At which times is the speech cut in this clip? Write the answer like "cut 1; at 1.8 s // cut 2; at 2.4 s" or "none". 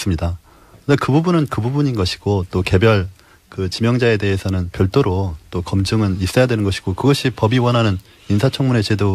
cut 1; at 7.6 s